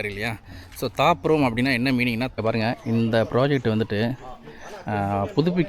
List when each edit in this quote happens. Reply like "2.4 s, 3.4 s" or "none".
2.3 s